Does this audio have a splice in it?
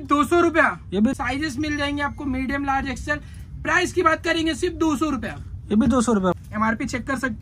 yes; 2 cuts; at 1.1 s, 6.3 s

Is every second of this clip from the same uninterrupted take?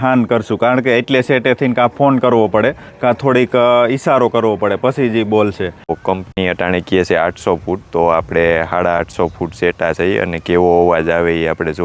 no; 1 cut; at 6.0 s

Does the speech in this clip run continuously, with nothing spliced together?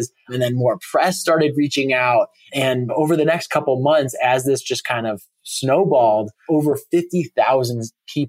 no; 2 cuts; at 2.6 s, 6.3 s

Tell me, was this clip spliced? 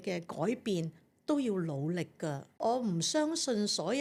no; 0 cuts

